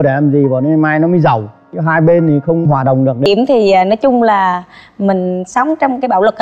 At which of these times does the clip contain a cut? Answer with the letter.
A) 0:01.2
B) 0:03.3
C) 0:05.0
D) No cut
B